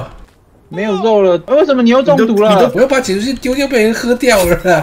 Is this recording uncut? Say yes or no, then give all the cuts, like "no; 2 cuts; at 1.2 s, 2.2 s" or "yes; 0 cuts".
no; 1 cut; at 2.7 s